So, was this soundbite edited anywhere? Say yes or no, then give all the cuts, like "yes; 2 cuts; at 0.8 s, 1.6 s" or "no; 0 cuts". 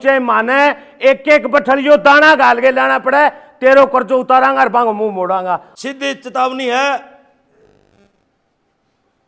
yes; 1 cut; at 5.7 s